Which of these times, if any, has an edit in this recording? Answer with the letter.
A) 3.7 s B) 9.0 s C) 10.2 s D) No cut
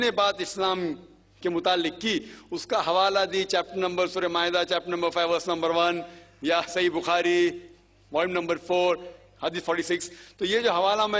A